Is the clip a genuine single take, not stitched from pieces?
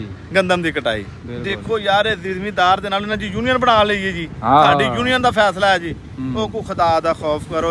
yes; 0 cuts

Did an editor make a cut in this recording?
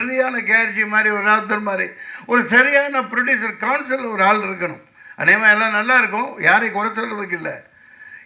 no; 0 cuts

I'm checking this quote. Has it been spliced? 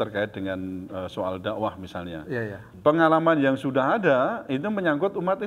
yes; 1 cut; at 2.6 s

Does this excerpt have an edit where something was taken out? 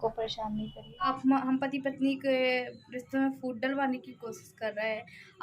yes; 1 cut; at 1.1 s

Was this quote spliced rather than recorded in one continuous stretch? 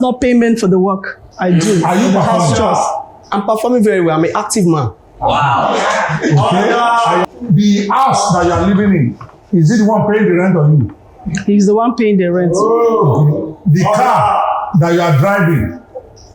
yes; 1 cut; at 7.2 s

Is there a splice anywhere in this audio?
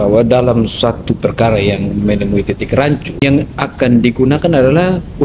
yes; 1 cut; at 3.2 s

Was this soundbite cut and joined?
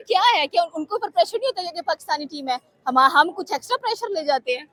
no; 0 cuts

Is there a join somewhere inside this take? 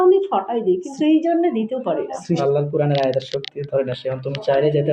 yes; 1 cut; at 2.4 s

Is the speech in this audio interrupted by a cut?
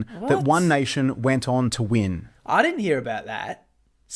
no; 0 cuts

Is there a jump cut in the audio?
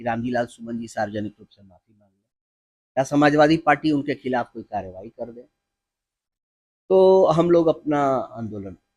no; 0 cuts

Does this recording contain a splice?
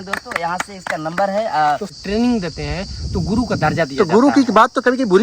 yes; 1 cut; at 1.9 s

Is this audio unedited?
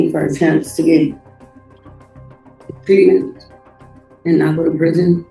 yes; 0 cuts

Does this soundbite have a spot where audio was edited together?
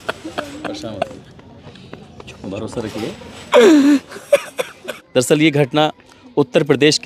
yes; 1 cut; at 4.9 s

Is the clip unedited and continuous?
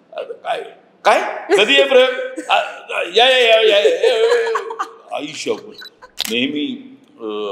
no; 1 cut; at 6.1 s

